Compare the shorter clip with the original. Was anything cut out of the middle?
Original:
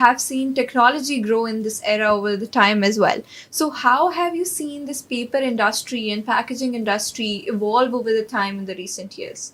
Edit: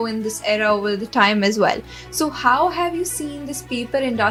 no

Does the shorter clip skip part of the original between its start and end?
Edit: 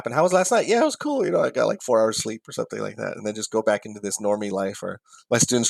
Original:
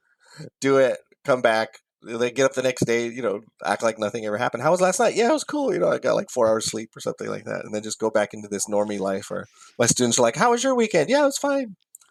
no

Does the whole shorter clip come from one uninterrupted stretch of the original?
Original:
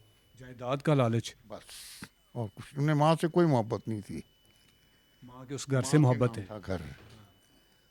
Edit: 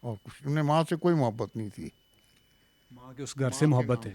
yes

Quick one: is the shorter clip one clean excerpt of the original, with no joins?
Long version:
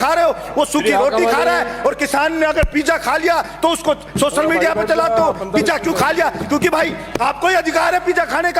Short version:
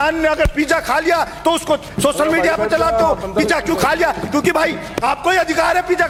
yes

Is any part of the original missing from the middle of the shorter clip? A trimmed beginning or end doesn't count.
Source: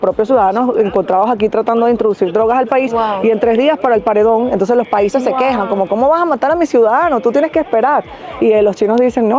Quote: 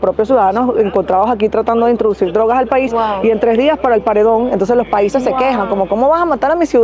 no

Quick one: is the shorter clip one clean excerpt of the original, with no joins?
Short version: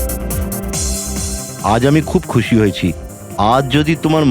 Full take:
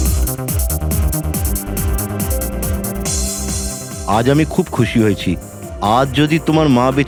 no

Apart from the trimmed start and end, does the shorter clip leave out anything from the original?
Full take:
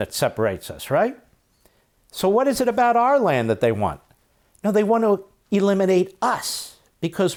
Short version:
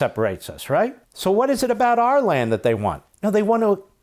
yes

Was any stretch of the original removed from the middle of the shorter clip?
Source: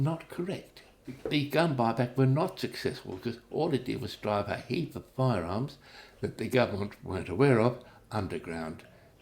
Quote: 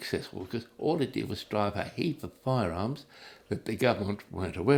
no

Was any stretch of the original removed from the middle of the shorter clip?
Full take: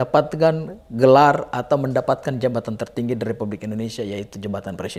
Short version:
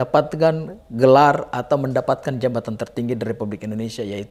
no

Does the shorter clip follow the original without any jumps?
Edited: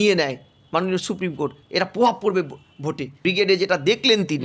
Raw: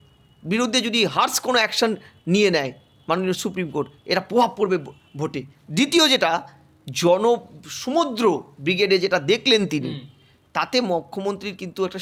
no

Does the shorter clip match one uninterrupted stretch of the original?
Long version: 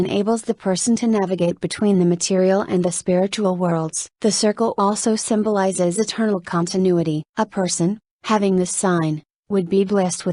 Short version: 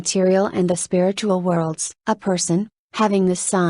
no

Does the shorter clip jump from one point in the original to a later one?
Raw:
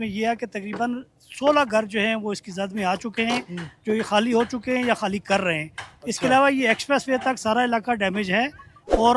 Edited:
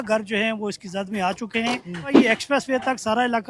yes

